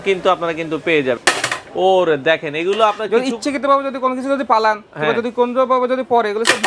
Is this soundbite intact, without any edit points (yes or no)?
no